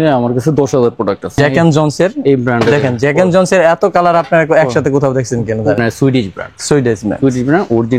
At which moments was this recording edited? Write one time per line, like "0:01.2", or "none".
0:01.4
0:05.8